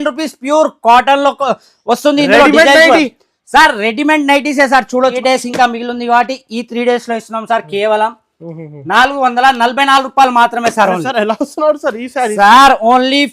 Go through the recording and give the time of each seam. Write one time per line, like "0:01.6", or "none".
0:05.2

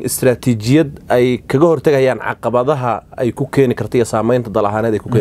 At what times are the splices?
none

